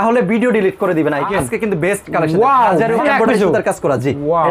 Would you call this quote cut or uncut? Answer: cut